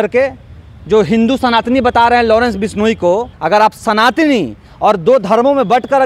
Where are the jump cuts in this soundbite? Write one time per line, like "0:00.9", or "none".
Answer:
0:03.3